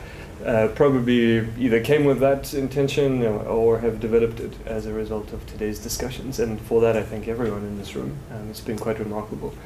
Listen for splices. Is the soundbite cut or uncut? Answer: uncut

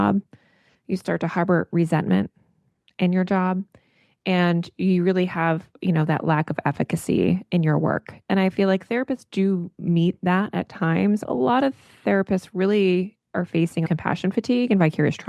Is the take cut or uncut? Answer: cut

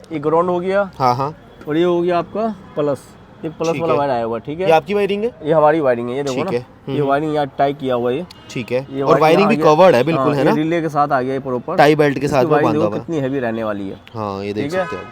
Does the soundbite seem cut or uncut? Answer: uncut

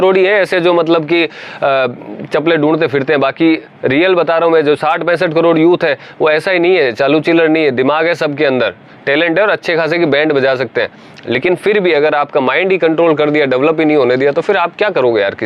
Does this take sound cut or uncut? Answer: uncut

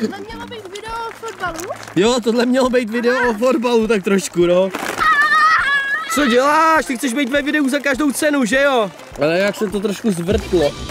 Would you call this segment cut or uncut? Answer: cut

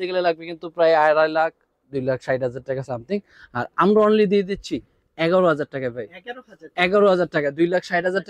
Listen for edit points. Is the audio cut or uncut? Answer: uncut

